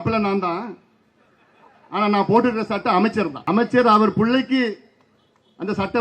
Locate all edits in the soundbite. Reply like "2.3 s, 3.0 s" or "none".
3.4 s